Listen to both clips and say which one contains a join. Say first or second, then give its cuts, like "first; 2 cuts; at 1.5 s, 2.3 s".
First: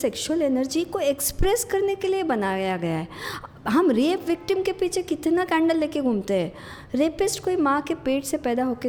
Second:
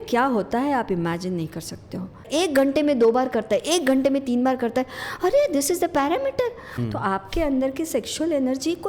second; 2 cuts; at 2.3 s, 6.7 s